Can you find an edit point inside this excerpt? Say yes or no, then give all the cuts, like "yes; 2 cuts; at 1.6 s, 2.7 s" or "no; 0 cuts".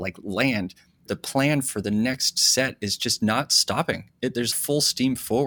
yes; 2 cuts; at 1.1 s, 4.5 s